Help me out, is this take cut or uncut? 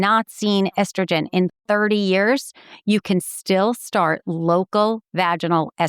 uncut